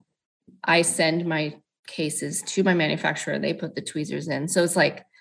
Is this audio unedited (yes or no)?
yes